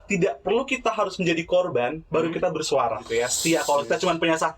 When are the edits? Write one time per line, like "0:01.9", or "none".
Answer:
0:03.0